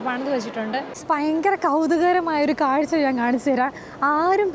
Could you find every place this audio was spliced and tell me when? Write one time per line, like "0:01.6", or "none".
0:00.9